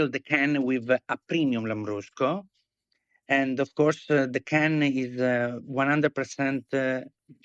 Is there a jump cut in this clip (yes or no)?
no